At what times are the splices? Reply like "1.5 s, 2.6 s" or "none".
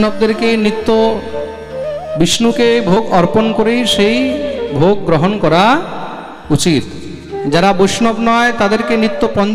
none